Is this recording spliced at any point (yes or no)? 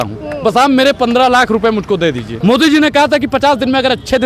yes